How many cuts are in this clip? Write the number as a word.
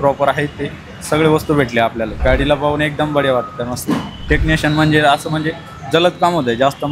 two